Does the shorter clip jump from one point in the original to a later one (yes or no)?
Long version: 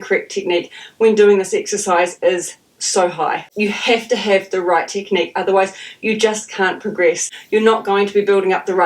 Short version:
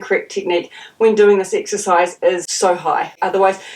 yes